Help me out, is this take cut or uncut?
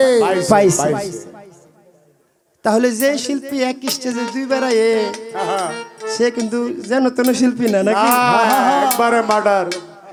uncut